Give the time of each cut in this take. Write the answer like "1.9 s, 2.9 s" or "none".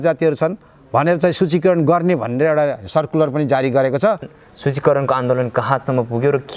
4.3 s